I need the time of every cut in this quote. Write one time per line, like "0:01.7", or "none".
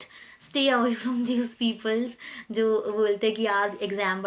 none